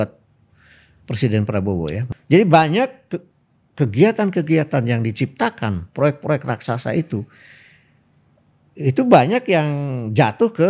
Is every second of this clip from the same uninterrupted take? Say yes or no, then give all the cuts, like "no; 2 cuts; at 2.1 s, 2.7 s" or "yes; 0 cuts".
no; 1 cut; at 2.1 s